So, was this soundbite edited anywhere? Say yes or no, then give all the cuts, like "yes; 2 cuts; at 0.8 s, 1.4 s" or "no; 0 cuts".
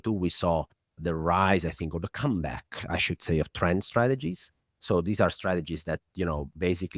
yes; 1 cut; at 1.0 s